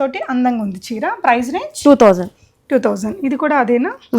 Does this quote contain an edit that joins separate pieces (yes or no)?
no